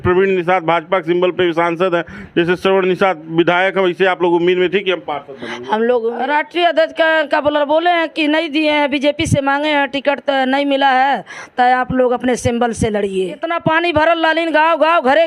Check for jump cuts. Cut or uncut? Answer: cut